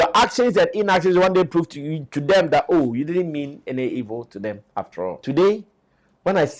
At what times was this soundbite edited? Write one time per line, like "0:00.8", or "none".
0:05.2